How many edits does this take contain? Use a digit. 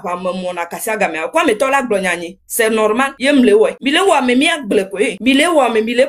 2